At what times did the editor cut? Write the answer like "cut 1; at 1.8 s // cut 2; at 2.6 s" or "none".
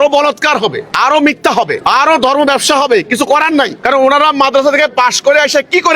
cut 1; at 0.8 s // cut 2; at 1.8 s // cut 3; at 3.8 s